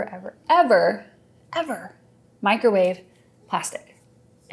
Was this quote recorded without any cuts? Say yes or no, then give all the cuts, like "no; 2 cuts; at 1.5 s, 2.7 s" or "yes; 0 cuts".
yes; 0 cuts